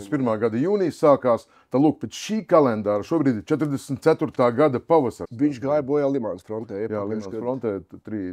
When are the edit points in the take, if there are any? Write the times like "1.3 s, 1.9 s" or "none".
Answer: 5.2 s